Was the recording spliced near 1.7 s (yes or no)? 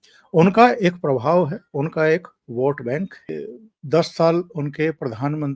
no